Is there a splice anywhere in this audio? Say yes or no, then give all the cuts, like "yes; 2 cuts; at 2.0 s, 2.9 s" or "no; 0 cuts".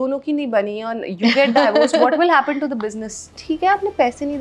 yes; 1 cut; at 3.4 s